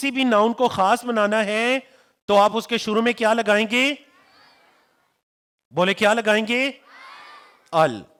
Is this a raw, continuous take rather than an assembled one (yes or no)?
yes